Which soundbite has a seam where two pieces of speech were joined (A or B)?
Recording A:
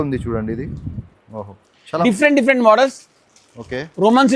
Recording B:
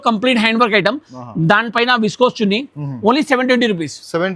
A